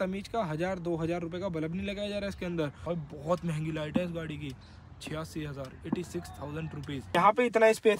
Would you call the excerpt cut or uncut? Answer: cut